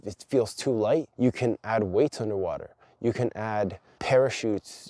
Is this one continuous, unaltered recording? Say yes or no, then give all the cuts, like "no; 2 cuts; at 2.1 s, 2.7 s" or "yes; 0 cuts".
no; 2 cuts; at 1.1 s, 3.9 s